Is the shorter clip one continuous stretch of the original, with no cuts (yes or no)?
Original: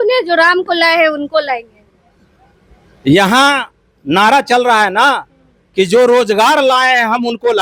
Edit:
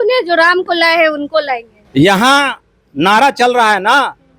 no